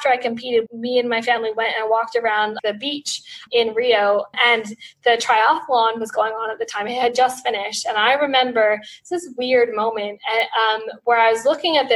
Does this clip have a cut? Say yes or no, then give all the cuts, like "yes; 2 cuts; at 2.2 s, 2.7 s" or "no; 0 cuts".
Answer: no; 0 cuts